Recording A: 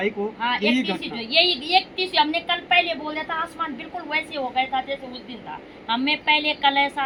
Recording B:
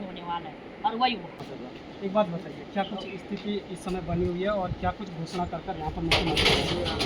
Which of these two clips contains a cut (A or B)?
B